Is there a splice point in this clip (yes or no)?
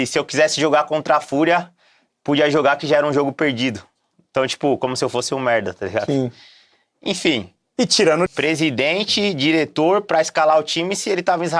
yes